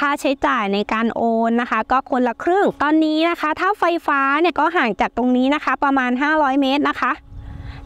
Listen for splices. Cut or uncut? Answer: cut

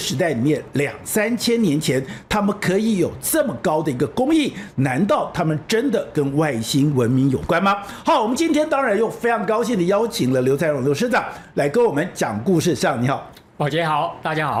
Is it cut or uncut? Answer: uncut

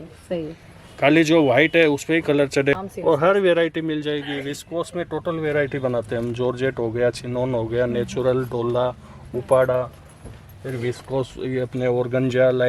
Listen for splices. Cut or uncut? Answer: cut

